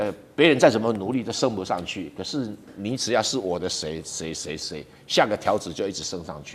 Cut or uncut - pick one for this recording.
uncut